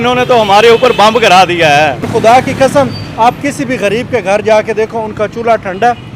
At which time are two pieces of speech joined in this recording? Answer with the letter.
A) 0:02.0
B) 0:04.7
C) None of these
A